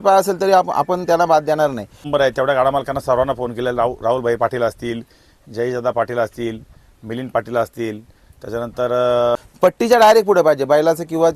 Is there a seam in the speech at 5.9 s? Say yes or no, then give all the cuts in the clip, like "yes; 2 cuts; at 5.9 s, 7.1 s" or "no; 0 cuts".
no; 2 cuts; at 2.1 s, 9.3 s